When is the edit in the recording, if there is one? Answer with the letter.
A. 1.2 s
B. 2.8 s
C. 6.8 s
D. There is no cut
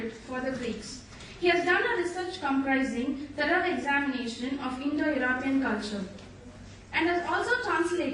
C